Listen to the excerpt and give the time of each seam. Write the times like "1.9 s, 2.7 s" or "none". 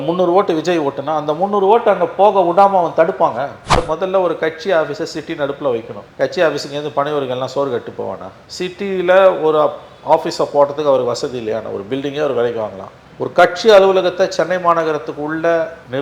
3.8 s, 6.0 s